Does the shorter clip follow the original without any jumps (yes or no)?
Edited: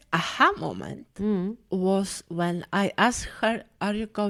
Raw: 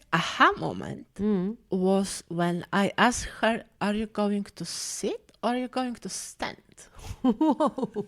yes